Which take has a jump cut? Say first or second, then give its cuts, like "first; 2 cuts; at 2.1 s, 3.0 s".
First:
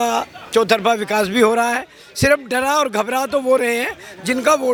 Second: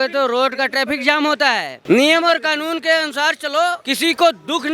second; 2 cuts; at 1.7 s, 3.8 s